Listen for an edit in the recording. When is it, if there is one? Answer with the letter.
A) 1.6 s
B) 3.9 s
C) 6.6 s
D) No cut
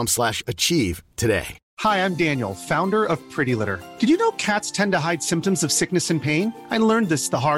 A